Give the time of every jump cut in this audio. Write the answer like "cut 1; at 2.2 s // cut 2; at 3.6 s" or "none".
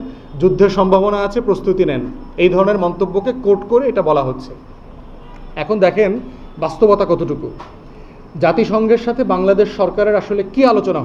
none